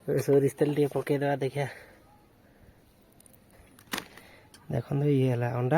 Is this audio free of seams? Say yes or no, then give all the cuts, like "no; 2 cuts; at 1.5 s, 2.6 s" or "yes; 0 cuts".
no; 1 cut; at 3.5 s